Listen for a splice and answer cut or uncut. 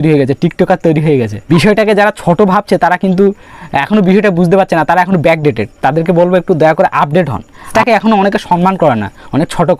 cut